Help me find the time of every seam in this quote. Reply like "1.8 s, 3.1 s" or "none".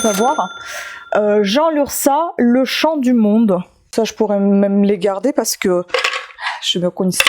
3.8 s